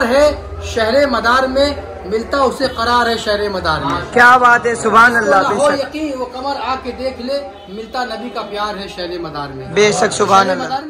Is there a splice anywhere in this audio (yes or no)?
no